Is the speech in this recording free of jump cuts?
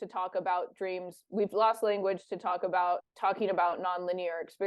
no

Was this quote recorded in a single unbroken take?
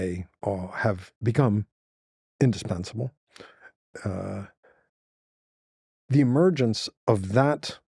yes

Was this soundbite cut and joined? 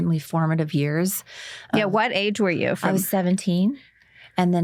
no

